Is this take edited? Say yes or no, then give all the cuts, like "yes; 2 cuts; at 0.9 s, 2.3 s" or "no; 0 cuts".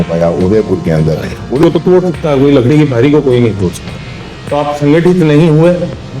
yes; 1 cut; at 1.6 s